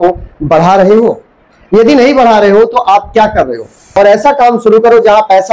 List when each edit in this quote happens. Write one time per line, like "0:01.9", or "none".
0:03.8